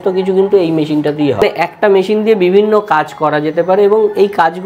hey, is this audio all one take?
no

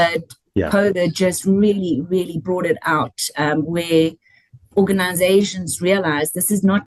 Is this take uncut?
yes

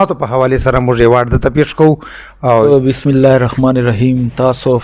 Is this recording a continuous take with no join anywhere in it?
no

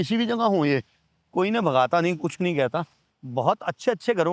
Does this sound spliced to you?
no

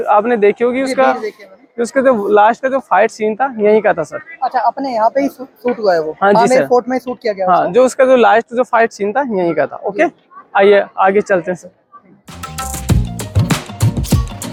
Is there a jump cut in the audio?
no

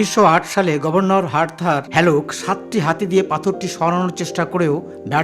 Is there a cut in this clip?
yes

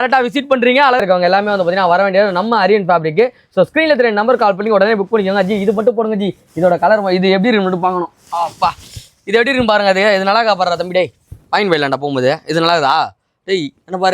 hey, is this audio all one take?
no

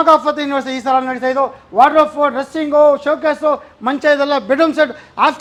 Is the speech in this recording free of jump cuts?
yes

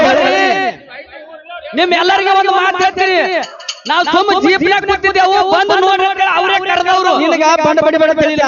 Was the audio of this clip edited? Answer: no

